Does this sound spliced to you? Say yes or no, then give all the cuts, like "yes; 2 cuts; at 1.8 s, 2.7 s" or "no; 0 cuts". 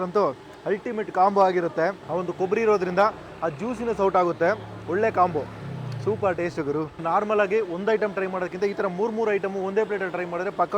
yes; 2 cuts; at 2.0 s, 7.0 s